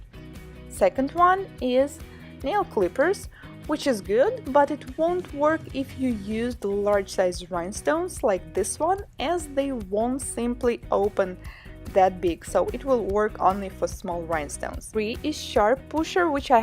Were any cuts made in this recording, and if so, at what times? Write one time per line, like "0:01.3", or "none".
0:06.8